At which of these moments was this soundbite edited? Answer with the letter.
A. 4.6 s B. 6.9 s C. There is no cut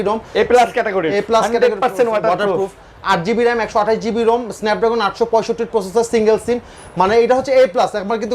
C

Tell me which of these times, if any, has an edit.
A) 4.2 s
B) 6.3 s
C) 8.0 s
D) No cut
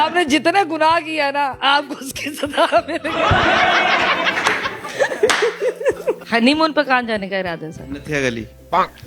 B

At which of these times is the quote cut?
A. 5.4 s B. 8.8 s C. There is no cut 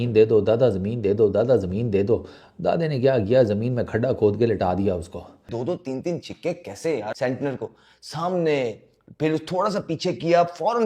A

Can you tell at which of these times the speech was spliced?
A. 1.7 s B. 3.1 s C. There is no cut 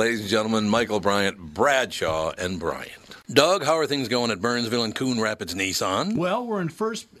B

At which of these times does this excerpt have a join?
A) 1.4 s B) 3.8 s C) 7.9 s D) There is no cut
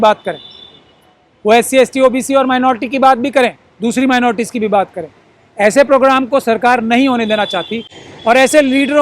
D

